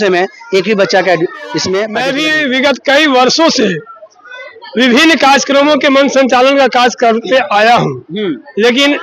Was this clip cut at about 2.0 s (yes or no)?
yes